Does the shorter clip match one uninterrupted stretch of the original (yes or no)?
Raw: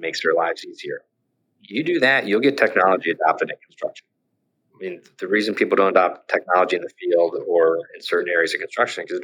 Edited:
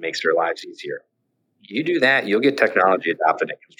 yes